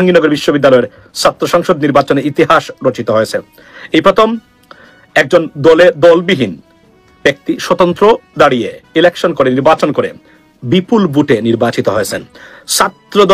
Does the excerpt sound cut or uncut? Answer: uncut